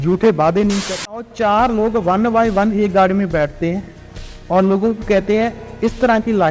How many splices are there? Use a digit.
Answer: 1